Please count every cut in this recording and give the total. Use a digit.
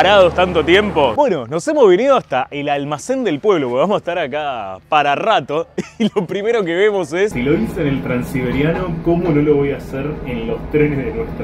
2